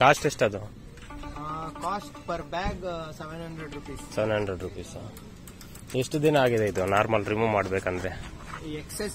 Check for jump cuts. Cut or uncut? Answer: uncut